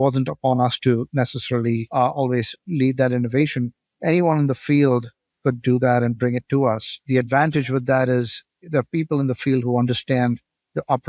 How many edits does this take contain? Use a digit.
3